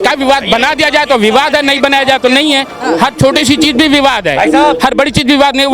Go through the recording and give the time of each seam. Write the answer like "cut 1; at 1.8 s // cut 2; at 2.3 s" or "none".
none

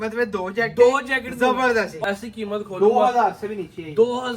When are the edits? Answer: cut 1; at 1.9 s

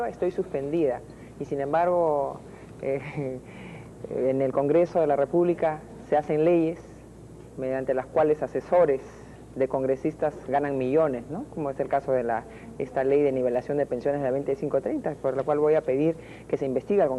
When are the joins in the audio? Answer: none

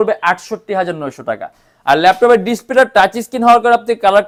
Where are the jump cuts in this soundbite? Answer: none

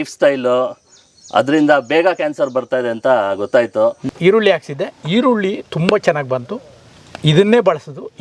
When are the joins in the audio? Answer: cut 1; at 4.0 s

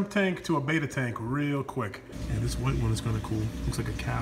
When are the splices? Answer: cut 1; at 2.1 s

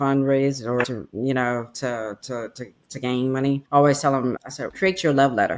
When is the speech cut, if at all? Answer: none

